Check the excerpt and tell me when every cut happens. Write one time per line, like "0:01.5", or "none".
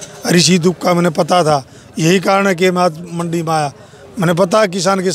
none